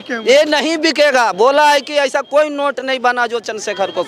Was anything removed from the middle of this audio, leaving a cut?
no; 0 cuts

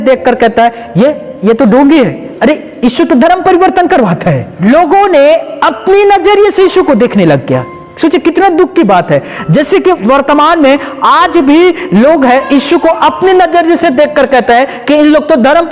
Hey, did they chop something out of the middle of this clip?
yes; 3 cuts; at 2.2 s, 4.5 s, 7.8 s

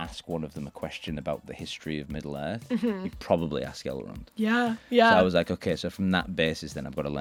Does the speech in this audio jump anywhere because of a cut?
no; 0 cuts

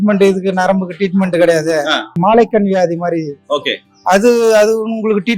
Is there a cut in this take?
yes; 1 cut; at 2.1 s

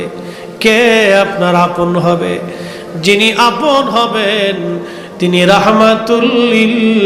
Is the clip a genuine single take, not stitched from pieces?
yes; 0 cuts

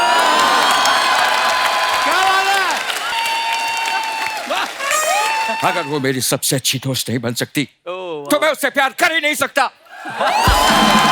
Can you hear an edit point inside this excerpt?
yes; 2 cuts; at 3.1 s, 5.6 s

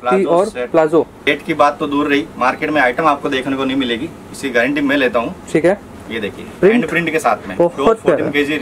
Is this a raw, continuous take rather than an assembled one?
no; 1 cut; at 1.2 s

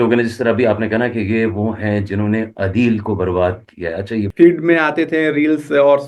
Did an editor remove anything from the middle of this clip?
yes; 1 cut; at 4.3 s

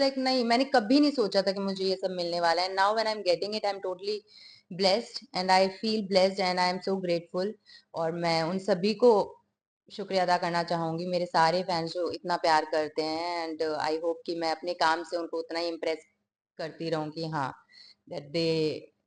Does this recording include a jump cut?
no; 0 cuts

